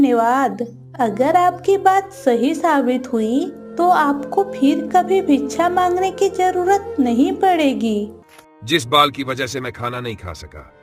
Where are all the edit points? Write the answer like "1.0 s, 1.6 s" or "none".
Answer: 8.2 s